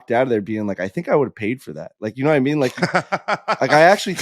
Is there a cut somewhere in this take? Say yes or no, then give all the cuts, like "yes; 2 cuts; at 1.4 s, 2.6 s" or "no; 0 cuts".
yes; 1 cut; at 0.9 s